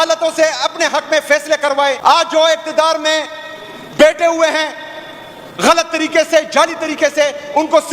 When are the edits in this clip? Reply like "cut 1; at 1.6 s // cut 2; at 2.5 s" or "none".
cut 1; at 2.0 s